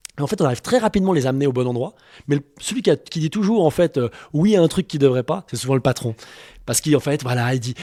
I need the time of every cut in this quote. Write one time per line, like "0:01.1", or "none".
none